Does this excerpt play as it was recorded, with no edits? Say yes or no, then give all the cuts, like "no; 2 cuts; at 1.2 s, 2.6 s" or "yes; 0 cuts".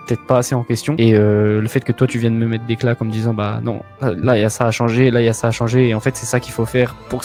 yes; 0 cuts